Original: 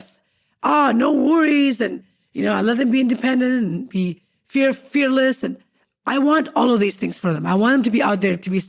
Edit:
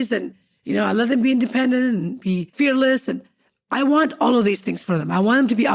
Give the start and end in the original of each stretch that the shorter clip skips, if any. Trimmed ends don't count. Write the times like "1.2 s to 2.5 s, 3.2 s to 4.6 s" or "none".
4.2 s to 4.8 s